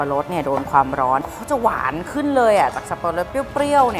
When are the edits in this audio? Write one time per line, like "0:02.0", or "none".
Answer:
0:01.3